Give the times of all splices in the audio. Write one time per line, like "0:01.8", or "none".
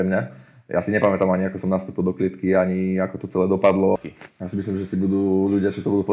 0:04.0